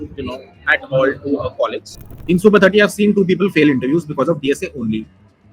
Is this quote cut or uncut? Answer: cut